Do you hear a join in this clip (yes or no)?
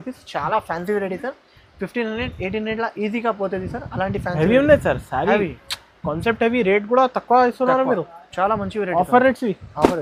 no